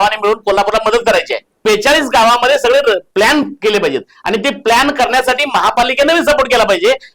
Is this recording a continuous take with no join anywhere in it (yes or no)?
no